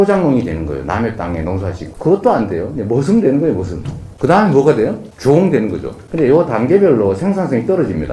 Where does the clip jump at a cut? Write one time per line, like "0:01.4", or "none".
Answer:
0:01.8